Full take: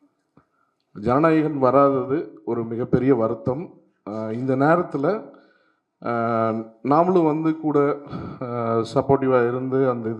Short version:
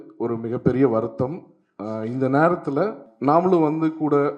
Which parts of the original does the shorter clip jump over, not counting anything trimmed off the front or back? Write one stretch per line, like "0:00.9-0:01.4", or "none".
0:05.3-0:06.7